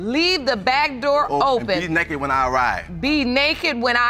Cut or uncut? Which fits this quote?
uncut